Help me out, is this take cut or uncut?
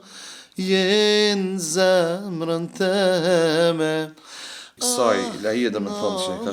uncut